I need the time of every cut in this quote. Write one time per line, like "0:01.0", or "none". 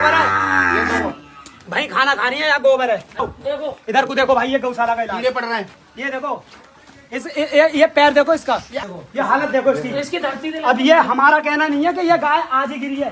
0:03.2
0:08.8